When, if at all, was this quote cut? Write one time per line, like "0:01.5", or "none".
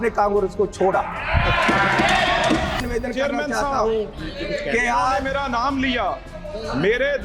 0:02.8